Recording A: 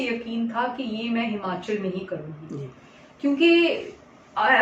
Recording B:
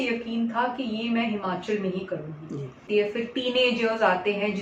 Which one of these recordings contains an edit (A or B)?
B